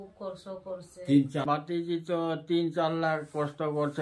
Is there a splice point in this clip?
yes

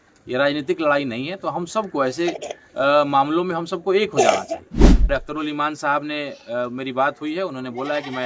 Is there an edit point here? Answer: yes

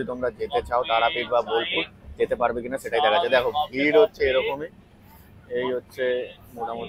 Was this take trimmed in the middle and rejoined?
no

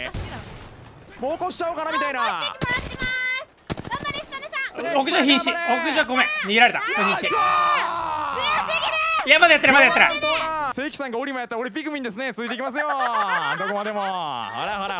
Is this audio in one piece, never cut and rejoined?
no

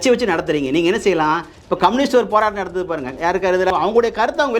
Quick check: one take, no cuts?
no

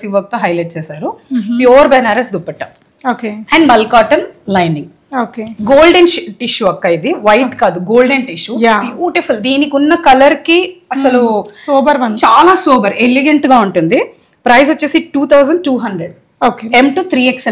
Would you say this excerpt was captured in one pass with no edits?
yes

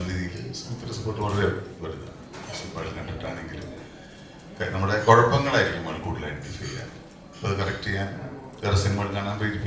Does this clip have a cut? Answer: yes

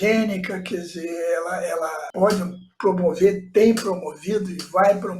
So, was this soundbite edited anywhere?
yes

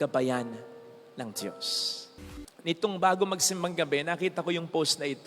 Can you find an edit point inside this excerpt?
yes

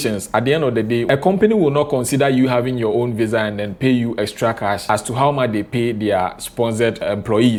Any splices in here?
no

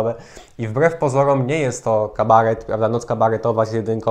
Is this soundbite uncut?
yes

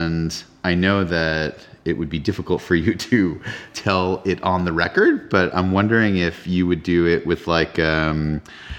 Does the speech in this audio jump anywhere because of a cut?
yes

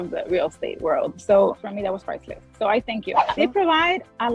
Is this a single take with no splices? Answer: no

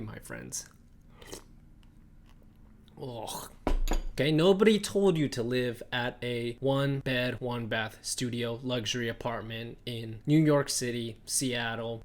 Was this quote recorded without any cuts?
no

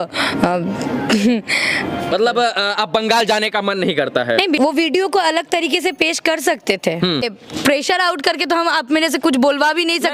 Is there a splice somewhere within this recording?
yes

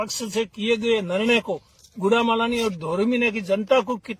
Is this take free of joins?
yes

